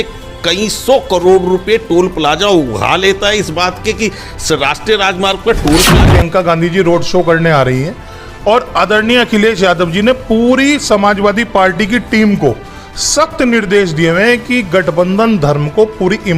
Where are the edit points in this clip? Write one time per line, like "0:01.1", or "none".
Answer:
0:06.0

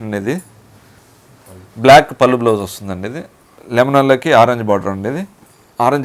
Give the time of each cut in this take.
0:03.6

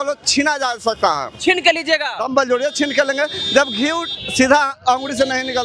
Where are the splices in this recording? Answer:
none

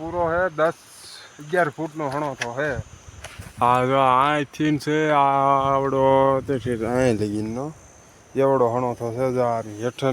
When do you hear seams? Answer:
none

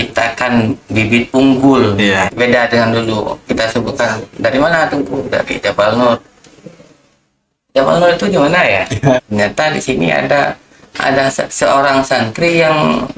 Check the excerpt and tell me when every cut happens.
0:02.3
0:09.2

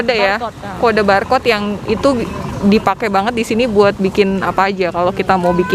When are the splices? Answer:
none

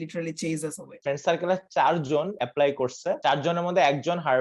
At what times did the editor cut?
0:00.9
0:02.3
0:03.2

